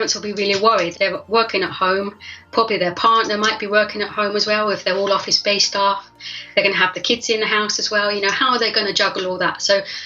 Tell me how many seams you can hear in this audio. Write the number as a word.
two